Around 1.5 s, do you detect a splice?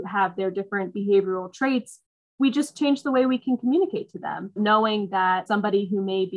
no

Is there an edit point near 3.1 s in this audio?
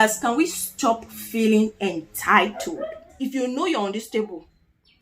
yes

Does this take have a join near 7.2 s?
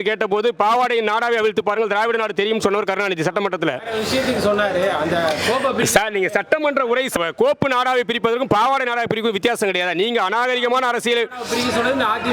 yes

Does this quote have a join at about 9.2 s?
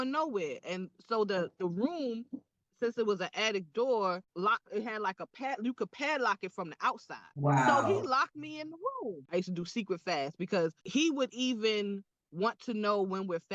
yes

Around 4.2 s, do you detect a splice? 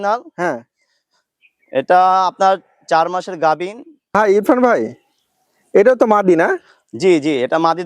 yes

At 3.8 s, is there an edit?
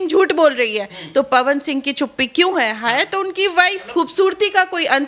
yes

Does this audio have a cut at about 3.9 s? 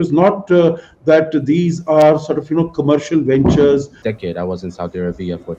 yes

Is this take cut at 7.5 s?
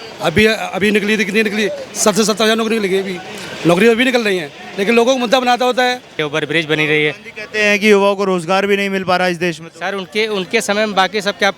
no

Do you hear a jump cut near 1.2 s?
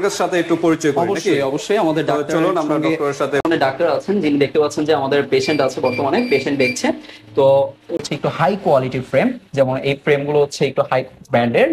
no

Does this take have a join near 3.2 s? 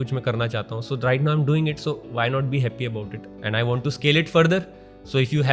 yes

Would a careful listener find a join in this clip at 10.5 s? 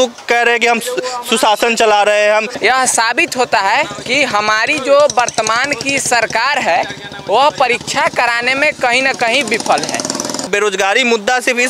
yes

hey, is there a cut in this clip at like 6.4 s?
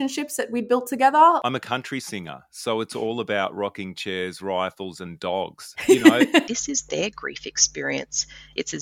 yes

